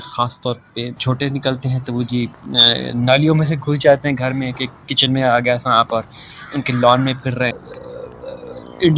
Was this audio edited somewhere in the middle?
yes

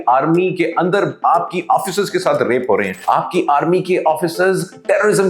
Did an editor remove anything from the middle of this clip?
yes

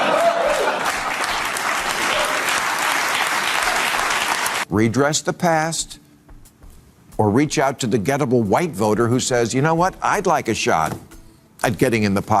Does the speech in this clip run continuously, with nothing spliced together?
no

